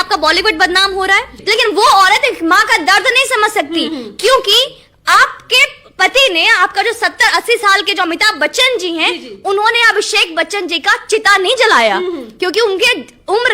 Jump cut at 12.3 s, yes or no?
no